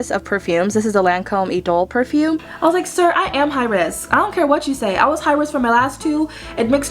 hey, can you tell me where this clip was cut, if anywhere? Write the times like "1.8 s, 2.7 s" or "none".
2.5 s